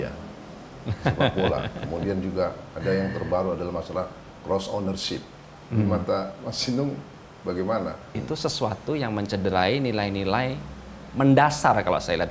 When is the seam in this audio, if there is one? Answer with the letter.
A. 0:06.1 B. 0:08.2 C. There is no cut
B